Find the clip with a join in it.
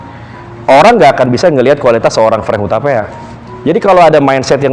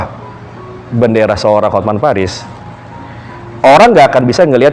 first; 1 cut; at 3.2 s

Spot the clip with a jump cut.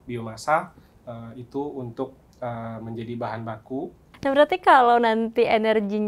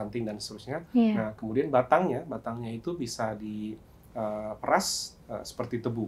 first; 1 cut; at 4.0 s

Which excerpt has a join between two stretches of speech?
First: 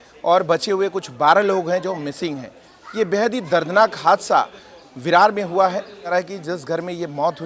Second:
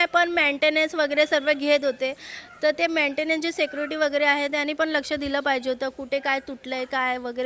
first; 1 cut; at 6.1 s

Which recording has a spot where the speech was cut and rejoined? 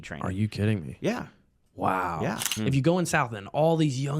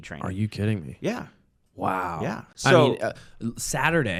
first; 1 cut; at 2.5 s

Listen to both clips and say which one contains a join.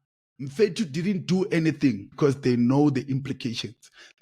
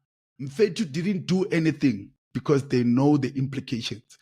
first; 1 cut; at 2.1 s

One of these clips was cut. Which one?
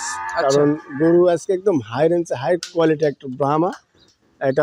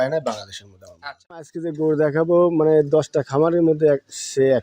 second; 2 cuts; at 1.4 s, 2.3 s

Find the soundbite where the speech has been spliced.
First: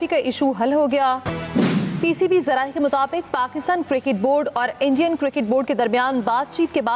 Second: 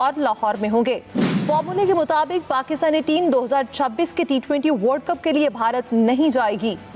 first; 1 cut; at 1.3 s

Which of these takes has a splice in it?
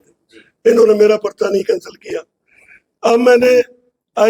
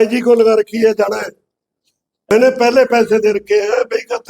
second; 1 cut; at 2.3 s

